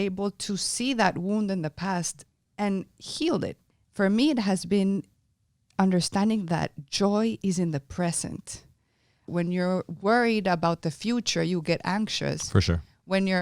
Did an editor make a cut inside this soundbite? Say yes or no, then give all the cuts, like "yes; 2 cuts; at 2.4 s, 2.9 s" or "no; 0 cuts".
yes; 2 cuts; at 3.6 s, 9.3 s